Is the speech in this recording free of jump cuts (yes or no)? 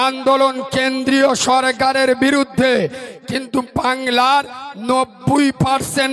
yes